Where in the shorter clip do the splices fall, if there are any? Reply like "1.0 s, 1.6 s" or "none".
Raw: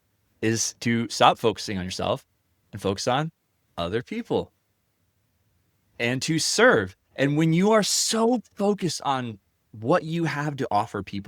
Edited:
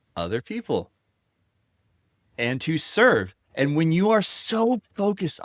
none